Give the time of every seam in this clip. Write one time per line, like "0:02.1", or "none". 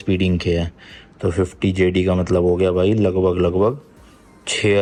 none